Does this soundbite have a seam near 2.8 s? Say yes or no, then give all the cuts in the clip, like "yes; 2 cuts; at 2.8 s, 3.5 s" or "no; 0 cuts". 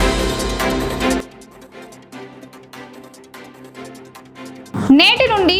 no; 2 cuts; at 1.2 s, 4.5 s